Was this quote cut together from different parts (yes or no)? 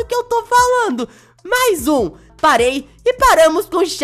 yes